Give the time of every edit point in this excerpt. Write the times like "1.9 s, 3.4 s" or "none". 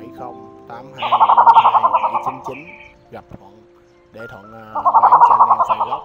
1.0 s, 2.7 s, 4.7 s